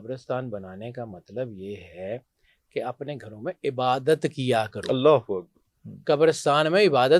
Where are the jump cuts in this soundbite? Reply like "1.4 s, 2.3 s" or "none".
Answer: none